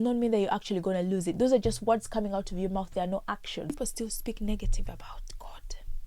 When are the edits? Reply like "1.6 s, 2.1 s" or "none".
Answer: 3.8 s